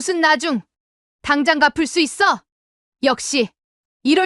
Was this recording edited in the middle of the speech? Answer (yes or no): yes